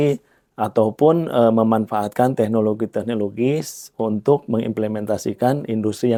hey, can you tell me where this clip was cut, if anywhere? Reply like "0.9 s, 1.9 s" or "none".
none